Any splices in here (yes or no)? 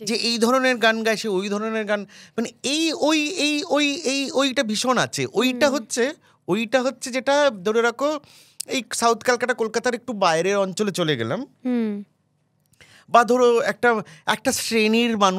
no